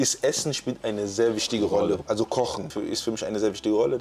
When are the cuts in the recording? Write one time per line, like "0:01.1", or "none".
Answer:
0:02.0
0:02.6